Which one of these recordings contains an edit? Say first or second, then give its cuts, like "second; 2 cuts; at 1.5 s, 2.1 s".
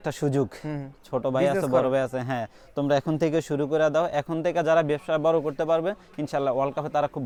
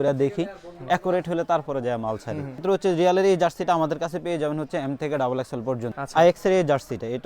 second; 2 cuts; at 2.6 s, 6.0 s